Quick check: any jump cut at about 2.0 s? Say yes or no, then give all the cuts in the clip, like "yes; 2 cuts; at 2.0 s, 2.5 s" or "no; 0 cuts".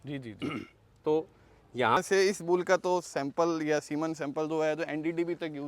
yes; 1 cut; at 2.0 s